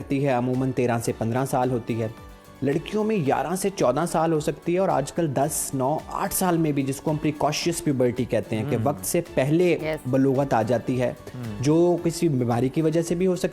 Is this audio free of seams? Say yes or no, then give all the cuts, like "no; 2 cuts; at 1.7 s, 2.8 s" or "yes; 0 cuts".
yes; 0 cuts